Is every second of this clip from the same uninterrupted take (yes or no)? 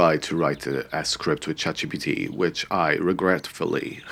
yes